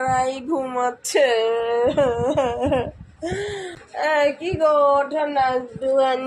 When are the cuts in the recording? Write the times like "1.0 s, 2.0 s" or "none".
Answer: 3.8 s